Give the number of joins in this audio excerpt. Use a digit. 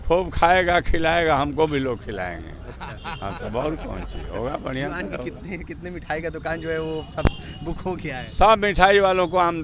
0